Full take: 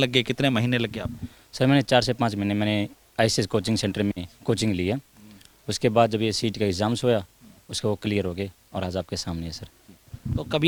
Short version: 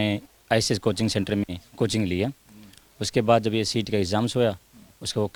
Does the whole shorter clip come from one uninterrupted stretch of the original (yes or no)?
yes